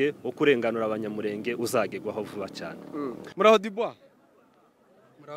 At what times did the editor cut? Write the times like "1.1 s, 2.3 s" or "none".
3.2 s